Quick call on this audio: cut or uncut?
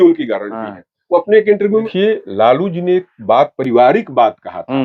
cut